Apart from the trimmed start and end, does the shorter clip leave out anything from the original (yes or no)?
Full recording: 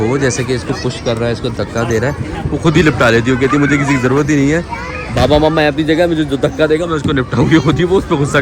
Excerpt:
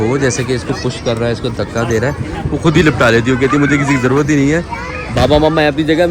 no